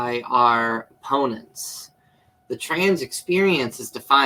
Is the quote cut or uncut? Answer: uncut